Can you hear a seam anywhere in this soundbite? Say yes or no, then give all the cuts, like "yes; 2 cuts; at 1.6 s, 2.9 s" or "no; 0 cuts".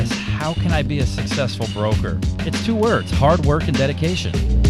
no; 0 cuts